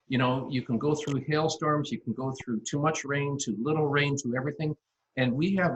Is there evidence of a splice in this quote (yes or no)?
no